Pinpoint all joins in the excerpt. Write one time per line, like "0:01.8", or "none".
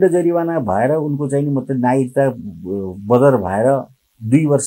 none